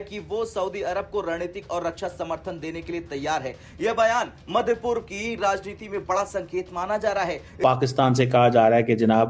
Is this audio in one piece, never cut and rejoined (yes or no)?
no